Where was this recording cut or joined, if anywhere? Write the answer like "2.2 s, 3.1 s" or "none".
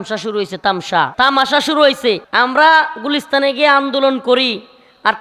1.1 s, 2.3 s